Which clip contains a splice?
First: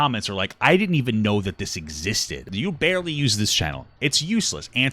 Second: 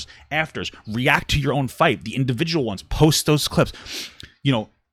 first; 1 cut; at 2.4 s

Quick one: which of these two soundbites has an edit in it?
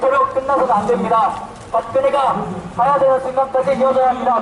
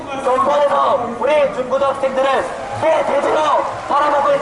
second; 1 cut; at 1.5 s

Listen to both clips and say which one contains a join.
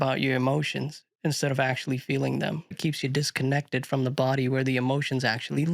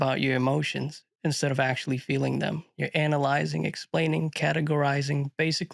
first; 1 cut; at 2.7 s

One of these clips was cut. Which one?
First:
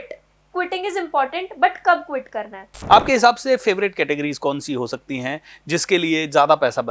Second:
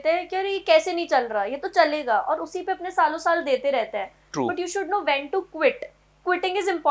first; 1 cut; at 2.7 s

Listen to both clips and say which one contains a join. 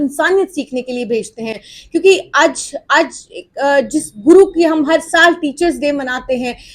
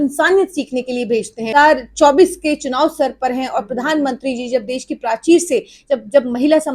second; 1 cut; at 1.5 s

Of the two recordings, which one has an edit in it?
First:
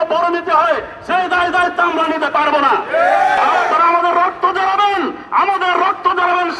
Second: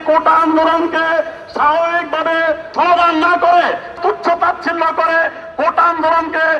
first; 1 cut; at 3.4 s

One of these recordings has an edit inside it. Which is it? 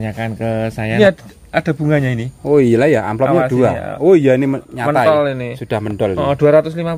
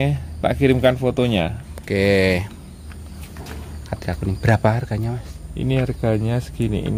first; 1 cut; at 0.9 s

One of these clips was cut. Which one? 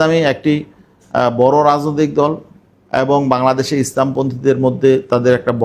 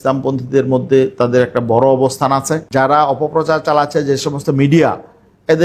second; 1 cut; at 2.6 s

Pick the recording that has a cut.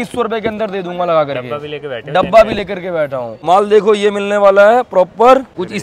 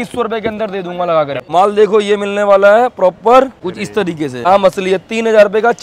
second; 2 cuts; at 1.4 s, 4.5 s

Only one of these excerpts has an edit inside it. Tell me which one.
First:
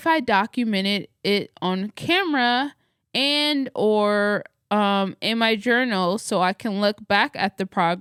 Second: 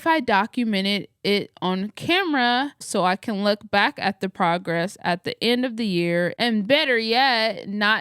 second; 1 cut; at 2.9 s

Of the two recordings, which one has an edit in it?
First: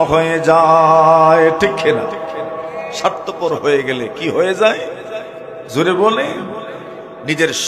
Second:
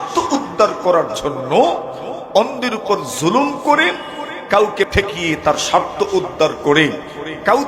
second; 1 cut; at 4.9 s

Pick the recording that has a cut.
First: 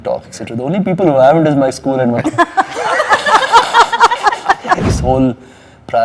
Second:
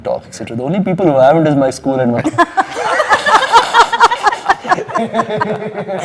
first; 1 cut; at 4.9 s

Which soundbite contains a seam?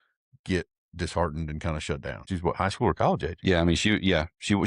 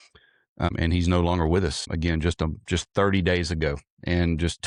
first; 1 cut; at 2.2 s

